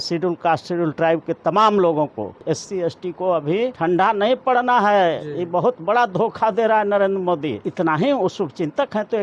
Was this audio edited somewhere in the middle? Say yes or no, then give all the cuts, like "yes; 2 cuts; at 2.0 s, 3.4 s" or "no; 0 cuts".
yes; 3 cuts; at 2.4 s, 3.8 s, 7.6 s